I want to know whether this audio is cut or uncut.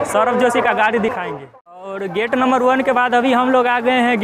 cut